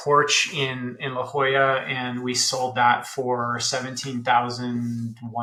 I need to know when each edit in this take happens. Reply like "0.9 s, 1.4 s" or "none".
none